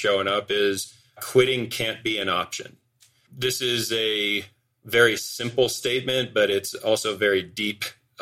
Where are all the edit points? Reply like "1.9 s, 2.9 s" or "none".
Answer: 1.2 s, 3.1 s